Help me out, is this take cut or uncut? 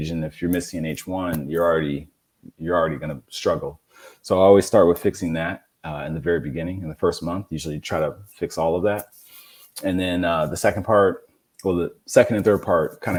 uncut